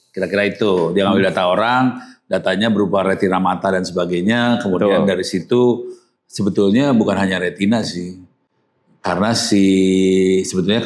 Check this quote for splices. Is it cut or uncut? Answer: uncut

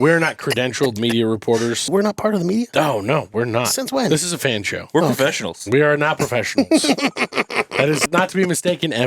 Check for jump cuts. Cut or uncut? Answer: cut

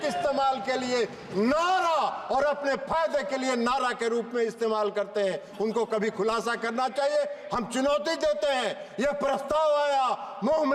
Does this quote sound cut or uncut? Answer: uncut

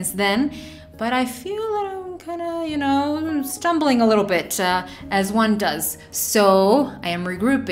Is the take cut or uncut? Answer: uncut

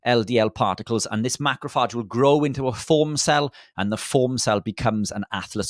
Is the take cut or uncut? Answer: uncut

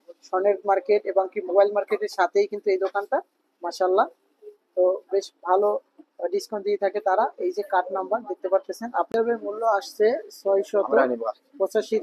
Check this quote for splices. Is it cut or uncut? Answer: cut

